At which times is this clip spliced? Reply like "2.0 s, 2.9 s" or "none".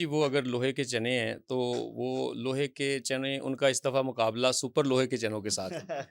none